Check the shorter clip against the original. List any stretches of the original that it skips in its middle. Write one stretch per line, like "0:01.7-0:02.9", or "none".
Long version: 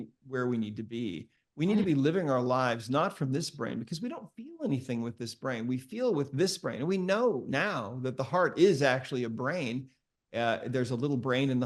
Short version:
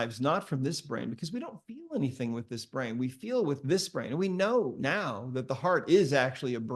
none